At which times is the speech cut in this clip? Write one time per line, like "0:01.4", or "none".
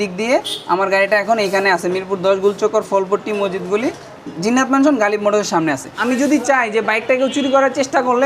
0:05.9